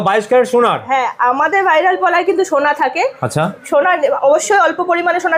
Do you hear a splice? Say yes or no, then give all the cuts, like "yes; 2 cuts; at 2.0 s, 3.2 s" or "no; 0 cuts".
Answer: no; 0 cuts